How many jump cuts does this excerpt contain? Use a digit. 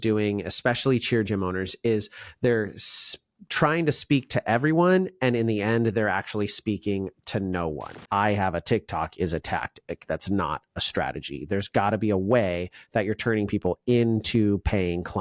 1